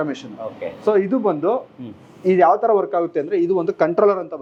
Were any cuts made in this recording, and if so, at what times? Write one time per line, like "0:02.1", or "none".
none